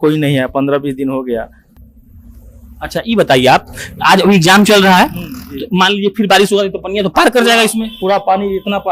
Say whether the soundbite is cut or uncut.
uncut